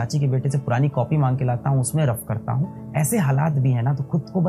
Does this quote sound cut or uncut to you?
uncut